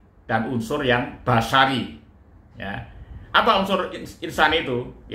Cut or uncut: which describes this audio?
uncut